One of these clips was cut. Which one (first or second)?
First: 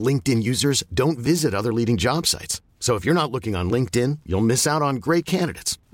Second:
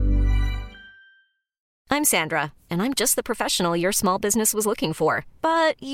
second